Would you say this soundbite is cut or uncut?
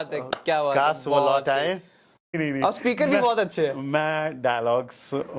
cut